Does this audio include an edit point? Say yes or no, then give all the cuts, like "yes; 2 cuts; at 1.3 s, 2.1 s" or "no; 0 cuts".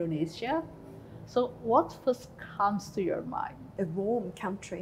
yes; 1 cut; at 3.7 s